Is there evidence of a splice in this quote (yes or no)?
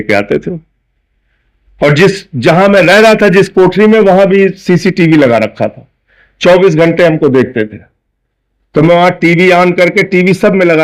no